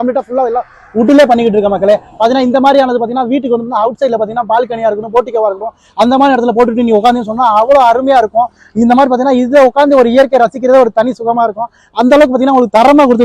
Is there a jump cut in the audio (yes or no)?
no